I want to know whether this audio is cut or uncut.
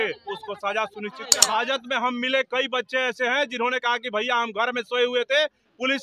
cut